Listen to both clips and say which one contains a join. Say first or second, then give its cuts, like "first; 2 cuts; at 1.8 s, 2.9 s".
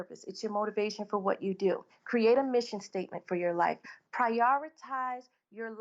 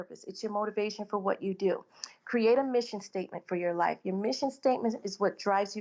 first; 2 cuts; at 1.9 s, 3.8 s